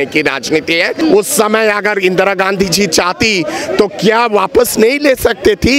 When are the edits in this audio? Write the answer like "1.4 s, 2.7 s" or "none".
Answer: 1.0 s